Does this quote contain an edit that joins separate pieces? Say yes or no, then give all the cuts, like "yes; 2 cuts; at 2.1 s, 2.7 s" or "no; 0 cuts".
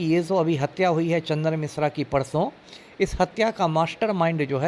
no; 0 cuts